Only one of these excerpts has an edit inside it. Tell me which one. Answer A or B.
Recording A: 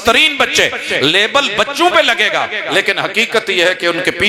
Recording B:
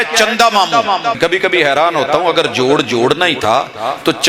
B